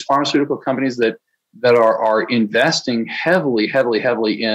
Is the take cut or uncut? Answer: uncut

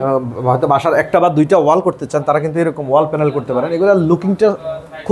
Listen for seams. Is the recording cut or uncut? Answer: uncut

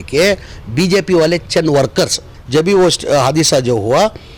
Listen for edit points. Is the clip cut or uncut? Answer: cut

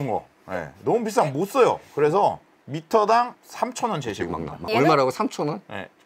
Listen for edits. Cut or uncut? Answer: cut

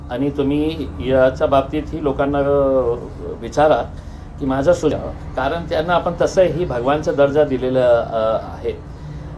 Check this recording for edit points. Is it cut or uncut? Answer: cut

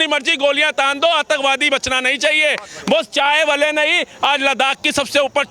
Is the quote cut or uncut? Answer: uncut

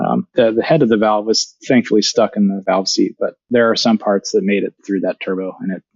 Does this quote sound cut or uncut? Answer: cut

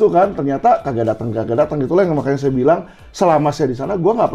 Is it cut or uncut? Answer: uncut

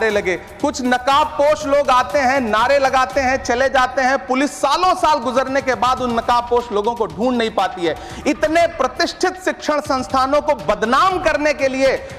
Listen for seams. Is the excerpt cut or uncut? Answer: uncut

